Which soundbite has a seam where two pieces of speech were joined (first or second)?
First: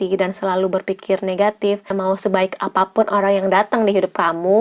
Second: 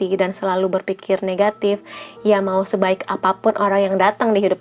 first